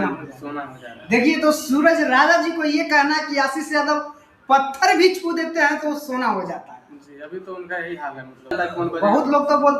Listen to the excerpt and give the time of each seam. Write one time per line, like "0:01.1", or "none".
0:08.5